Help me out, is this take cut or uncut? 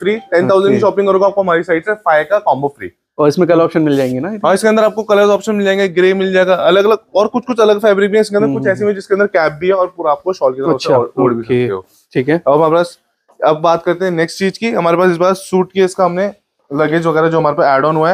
uncut